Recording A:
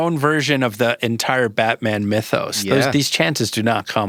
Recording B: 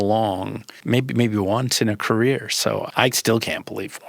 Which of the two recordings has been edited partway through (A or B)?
B